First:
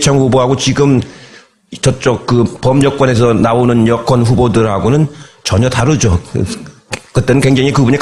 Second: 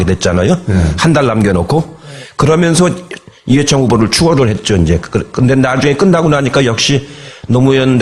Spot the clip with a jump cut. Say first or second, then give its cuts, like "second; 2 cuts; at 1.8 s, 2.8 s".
first; 1 cut; at 2.0 s